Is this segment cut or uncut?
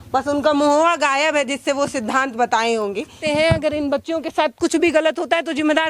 cut